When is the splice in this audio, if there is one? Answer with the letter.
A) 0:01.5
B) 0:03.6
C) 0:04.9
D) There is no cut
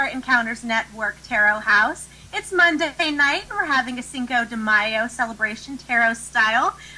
D